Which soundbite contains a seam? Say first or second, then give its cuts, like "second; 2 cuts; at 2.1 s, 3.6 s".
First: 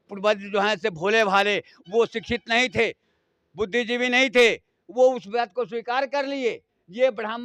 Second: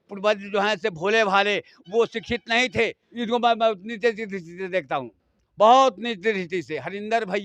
second; 1 cut; at 3.0 s